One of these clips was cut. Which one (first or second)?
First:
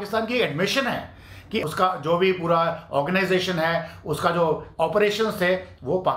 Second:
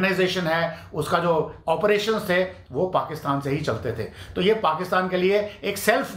first